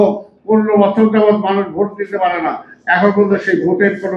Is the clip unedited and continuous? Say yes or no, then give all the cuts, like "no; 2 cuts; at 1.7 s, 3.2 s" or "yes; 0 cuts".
yes; 0 cuts